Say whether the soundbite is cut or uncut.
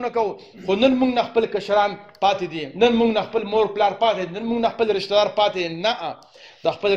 uncut